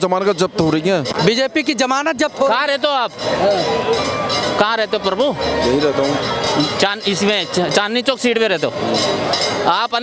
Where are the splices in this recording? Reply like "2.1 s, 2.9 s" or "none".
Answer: none